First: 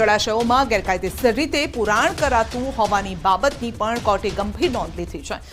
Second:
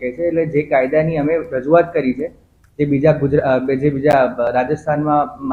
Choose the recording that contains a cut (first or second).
first